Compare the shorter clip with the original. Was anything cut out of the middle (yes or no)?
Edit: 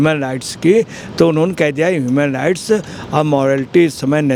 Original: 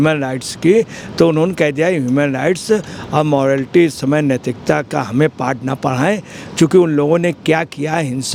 no